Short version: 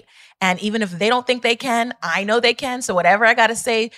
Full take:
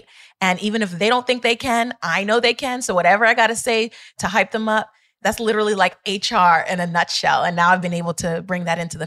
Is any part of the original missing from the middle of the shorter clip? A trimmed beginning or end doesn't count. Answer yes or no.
no